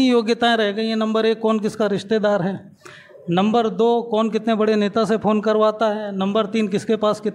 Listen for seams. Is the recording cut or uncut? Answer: uncut